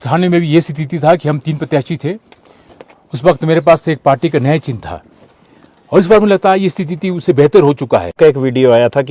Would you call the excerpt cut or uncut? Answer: cut